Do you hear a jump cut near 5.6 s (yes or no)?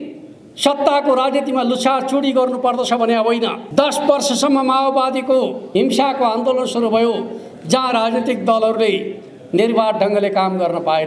yes